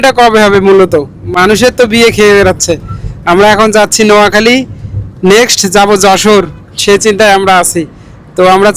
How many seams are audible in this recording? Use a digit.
0